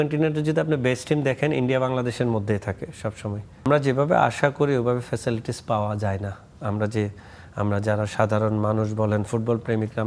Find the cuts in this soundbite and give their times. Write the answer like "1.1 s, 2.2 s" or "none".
3.7 s